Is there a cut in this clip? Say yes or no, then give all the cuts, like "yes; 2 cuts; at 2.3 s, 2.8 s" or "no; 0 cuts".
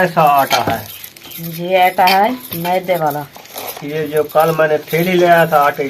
no; 0 cuts